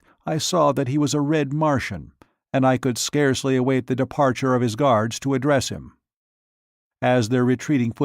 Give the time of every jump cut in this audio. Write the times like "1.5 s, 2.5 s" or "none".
5.1 s